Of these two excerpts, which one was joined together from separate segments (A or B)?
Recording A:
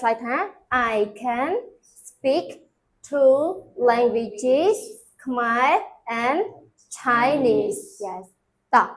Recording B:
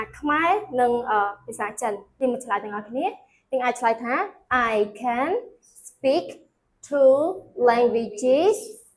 B